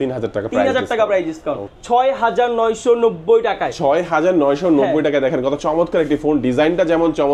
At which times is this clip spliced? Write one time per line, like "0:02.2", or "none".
0:01.7